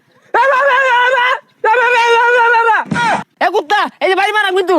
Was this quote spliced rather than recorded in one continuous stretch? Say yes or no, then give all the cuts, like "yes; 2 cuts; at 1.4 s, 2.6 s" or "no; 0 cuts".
yes; 1 cut; at 3.3 s